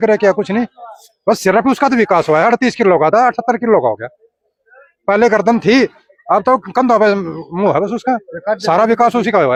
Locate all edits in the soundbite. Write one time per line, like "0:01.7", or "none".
none